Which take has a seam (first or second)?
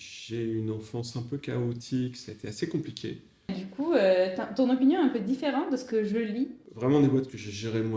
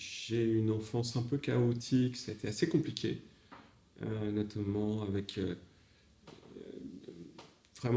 first